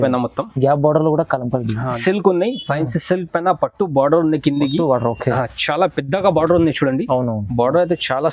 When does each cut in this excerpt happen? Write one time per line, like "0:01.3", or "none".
0:01.9

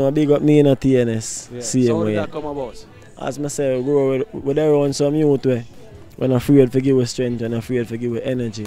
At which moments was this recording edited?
none

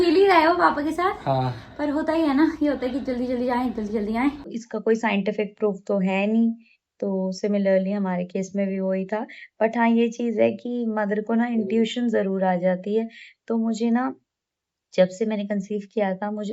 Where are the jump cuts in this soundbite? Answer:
0:04.5

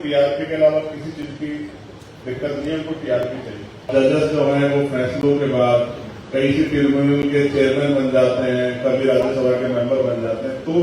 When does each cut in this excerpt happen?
0:03.9

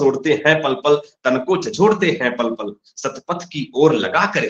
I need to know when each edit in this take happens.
none

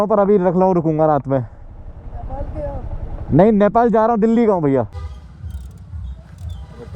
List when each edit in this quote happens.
0:04.9

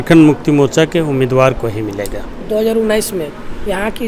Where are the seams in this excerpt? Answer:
none

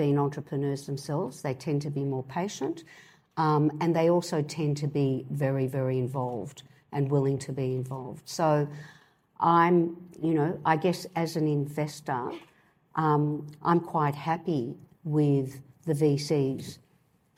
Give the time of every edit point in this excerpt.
none

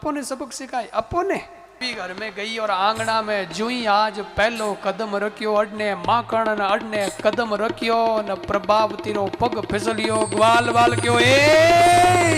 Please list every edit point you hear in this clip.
0:01.8

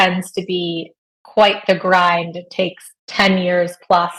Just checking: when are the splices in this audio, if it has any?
none

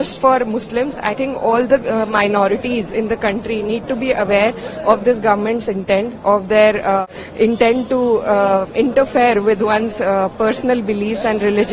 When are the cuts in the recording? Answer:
0:07.0

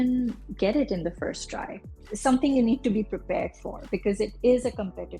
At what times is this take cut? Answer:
0:01.8

